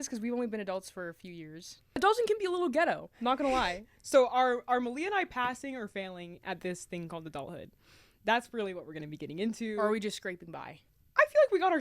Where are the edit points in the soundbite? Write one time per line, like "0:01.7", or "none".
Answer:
none